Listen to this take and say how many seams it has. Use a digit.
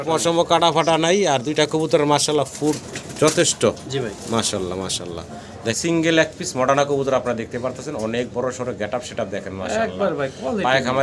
1